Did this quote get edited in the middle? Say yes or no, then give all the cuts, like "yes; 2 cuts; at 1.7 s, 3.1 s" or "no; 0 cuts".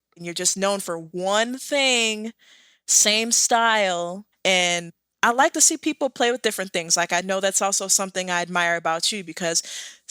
yes; 1 cut; at 1.0 s